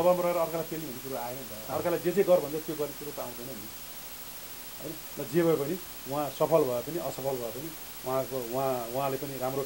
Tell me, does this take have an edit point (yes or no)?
no